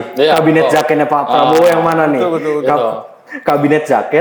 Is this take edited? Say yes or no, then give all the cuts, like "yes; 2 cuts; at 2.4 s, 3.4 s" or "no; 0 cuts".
no; 0 cuts